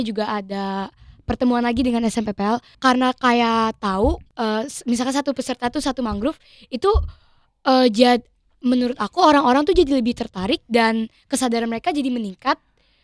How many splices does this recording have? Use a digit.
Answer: 2